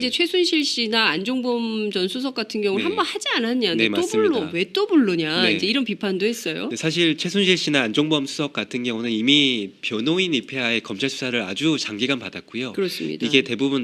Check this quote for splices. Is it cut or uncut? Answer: uncut